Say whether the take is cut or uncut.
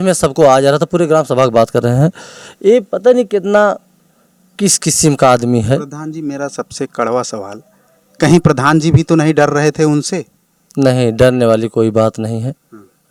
uncut